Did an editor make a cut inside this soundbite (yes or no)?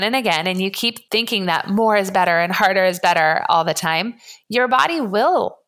yes